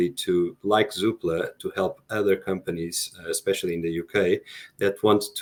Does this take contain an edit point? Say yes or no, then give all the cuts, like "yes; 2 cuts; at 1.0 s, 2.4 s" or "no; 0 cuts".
no; 0 cuts